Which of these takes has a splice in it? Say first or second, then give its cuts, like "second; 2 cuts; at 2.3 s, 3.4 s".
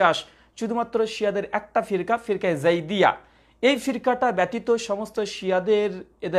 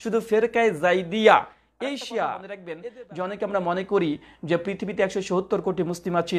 second; 1 cut; at 2.7 s